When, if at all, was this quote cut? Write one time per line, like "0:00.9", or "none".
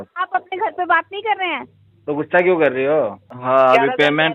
0:03.3